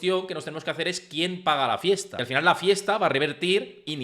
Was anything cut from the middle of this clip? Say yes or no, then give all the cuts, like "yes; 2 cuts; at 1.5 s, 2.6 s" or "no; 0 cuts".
yes; 1 cut; at 2.1 s